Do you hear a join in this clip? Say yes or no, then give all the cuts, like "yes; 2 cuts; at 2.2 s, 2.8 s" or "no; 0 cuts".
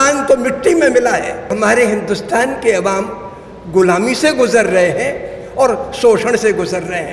yes; 1 cut; at 1.5 s